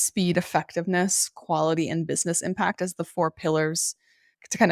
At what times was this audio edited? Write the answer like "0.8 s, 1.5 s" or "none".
none